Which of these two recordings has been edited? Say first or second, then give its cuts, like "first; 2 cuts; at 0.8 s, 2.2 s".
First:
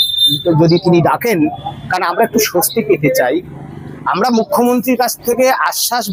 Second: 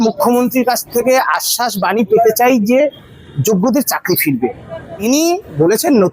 second; 1 cut; at 5.0 s